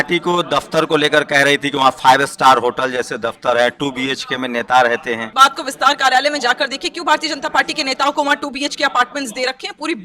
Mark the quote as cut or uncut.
cut